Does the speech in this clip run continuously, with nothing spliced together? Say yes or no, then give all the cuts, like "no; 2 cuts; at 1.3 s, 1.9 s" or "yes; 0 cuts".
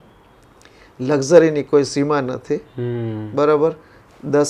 yes; 0 cuts